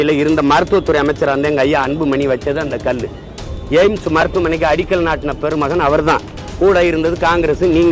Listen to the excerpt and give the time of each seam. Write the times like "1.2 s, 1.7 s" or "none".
none